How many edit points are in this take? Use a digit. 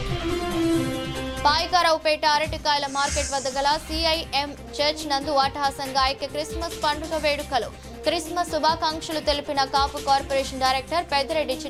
0